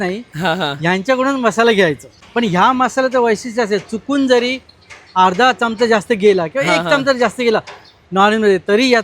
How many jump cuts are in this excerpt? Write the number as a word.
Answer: one